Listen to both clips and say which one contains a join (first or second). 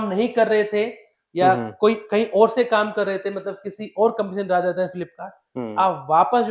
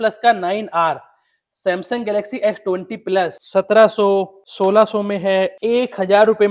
second